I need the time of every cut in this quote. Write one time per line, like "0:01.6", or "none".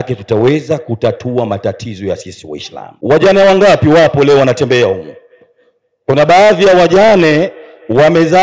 0:02.8

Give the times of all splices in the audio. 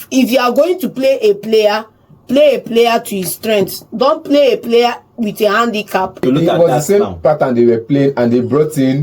0:06.2

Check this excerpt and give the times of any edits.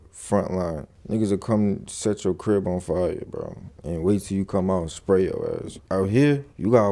0:03.7
0:05.7

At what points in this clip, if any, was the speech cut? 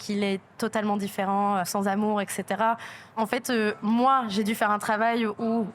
0:01.7
0:03.0

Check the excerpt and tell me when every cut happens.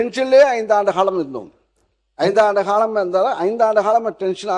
none

